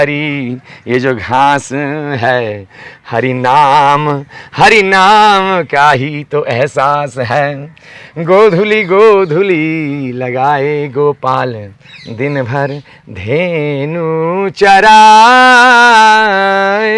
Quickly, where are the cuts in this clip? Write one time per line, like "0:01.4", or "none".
none